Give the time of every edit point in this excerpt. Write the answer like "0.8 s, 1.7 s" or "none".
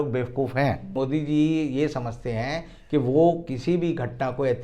0.9 s